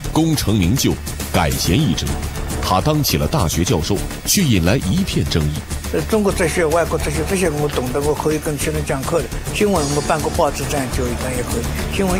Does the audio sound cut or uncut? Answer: uncut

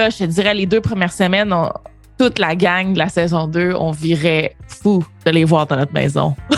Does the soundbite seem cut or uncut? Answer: uncut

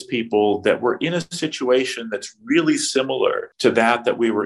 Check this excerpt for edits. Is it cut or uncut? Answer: cut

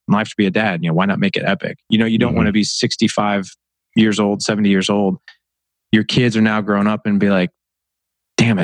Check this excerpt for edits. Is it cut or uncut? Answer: uncut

